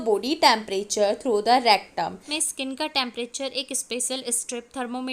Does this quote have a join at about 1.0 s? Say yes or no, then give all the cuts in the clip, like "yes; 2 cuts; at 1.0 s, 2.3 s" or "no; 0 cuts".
no; 1 cut; at 2.3 s